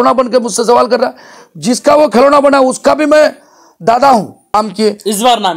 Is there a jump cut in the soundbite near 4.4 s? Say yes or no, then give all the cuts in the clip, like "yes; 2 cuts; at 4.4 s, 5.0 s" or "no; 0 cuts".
yes; 1 cut; at 4.4 s